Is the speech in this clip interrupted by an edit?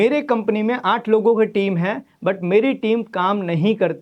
no; 0 cuts

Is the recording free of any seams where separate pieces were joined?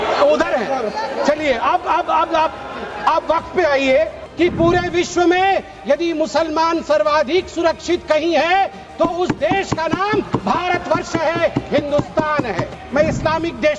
no; 2 cuts; at 4.2 s, 12.7 s

